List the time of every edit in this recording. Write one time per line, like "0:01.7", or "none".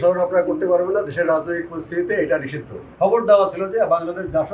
0:02.9